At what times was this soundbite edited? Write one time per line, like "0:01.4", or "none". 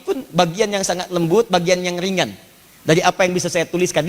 none